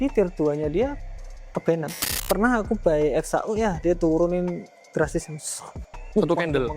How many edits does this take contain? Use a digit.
1